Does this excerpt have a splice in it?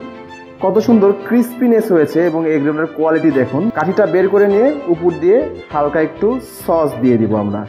yes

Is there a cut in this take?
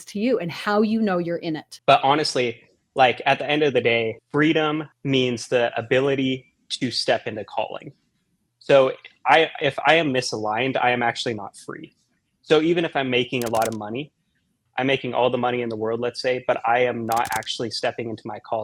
yes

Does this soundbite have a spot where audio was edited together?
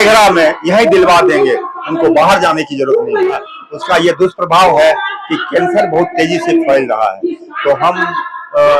yes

